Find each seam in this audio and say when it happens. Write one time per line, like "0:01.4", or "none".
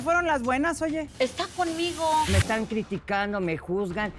0:01.1
0:02.3